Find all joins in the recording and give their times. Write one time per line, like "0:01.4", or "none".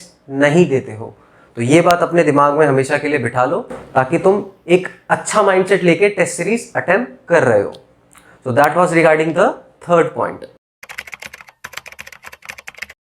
none